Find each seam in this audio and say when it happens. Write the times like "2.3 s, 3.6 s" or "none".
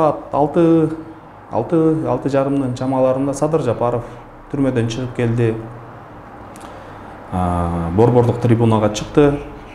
none